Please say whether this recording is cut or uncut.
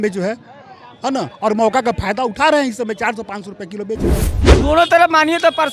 cut